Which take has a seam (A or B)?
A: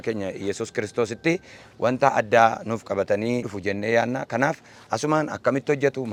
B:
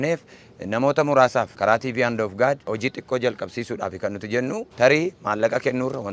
B